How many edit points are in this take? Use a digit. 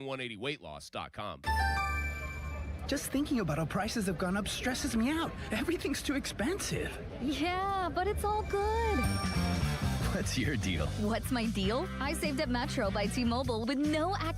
1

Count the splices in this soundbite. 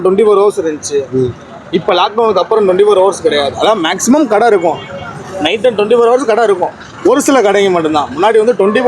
0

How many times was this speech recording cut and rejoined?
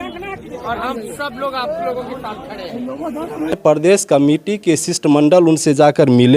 1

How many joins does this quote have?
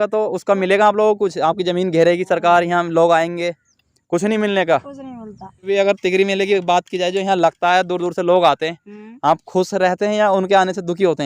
1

